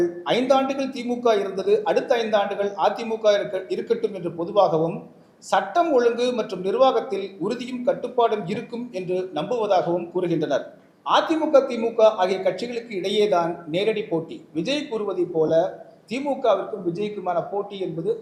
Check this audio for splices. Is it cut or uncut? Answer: uncut